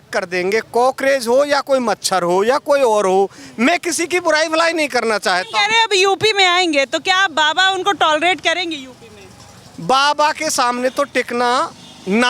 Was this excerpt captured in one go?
yes; 0 cuts

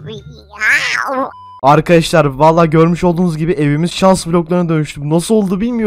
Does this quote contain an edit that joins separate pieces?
yes; 1 cut; at 1.6 s

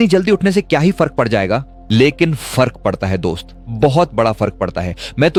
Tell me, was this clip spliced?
no; 0 cuts

